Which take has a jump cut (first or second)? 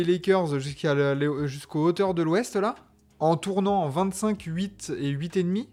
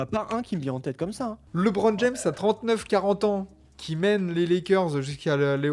second